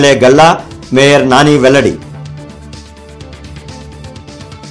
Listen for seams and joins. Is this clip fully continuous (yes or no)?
yes